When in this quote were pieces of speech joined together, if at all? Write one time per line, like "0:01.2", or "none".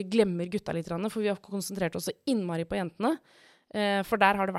none